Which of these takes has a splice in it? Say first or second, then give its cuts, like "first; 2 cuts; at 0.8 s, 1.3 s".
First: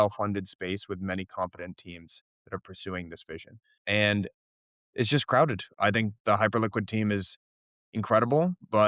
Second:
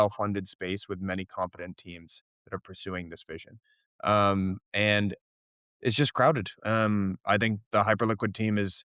first; 2 cuts; at 3.8 s, 5.7 s